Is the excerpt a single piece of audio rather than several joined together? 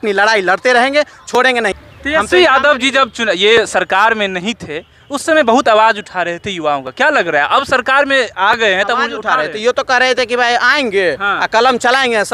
no; 1 cut; at 1.8 s

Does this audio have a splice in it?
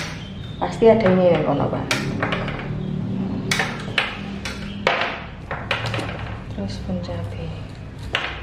no; 0 cuts

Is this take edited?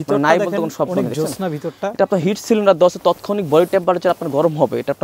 no; 0 cuts

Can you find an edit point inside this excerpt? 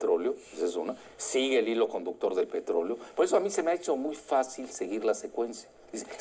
no; 0 cuts

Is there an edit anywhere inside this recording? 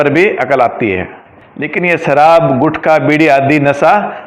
yes; 1 cut; at 1.4 s

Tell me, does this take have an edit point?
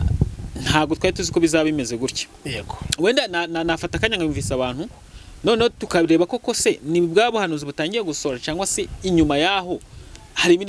no; 0 cuts

